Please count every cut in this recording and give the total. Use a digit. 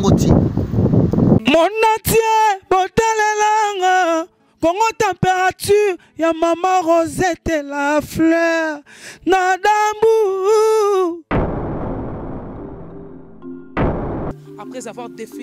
1